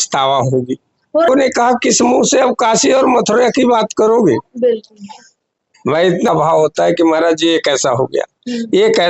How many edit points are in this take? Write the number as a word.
two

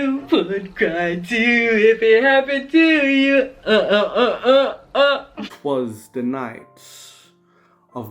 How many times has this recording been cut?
one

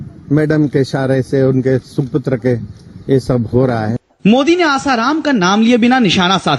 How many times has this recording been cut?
one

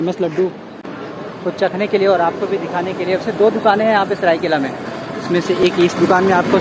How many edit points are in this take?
zero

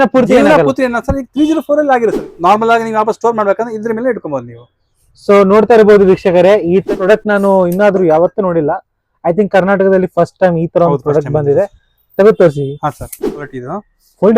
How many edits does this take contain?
three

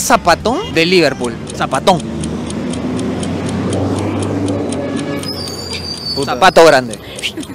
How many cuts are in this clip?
zero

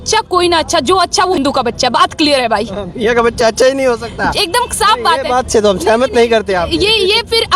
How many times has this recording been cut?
one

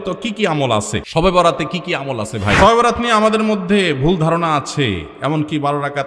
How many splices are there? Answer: two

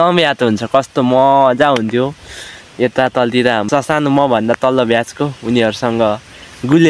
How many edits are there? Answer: one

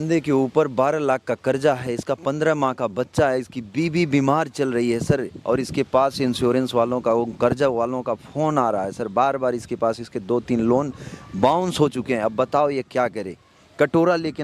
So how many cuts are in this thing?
zero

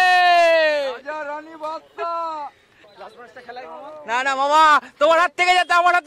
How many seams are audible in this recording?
one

